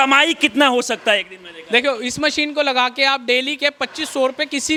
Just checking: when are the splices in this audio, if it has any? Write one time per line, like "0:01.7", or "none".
none